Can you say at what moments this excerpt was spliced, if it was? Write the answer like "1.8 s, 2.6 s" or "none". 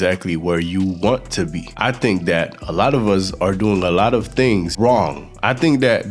1.6 s, 4.7 s

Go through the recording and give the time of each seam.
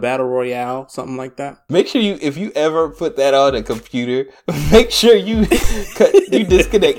1.6 s

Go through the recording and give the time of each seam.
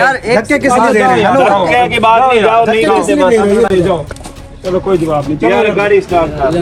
none

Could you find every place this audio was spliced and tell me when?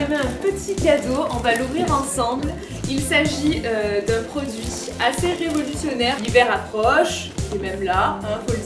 none

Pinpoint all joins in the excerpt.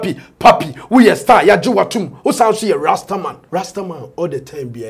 3.4 s

